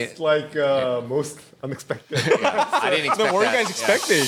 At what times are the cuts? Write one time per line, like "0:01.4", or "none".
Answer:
none